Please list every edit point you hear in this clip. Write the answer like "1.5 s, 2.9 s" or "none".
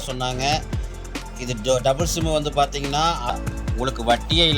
3.2 s

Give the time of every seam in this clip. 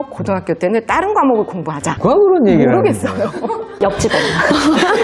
1.8 s

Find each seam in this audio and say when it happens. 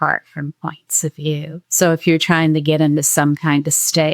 1.6 s

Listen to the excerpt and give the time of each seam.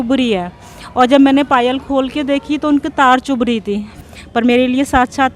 3.9 s

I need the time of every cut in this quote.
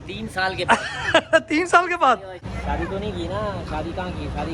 2.6 s

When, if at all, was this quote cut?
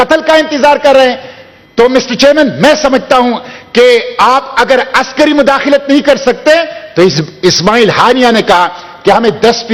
none

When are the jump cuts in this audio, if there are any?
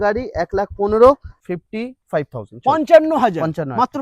1.3 s

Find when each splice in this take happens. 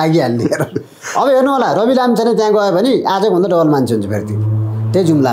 none

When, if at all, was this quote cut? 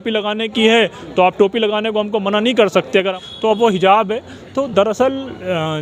3.1 s

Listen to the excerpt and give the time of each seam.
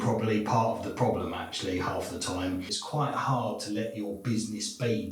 2.8 s

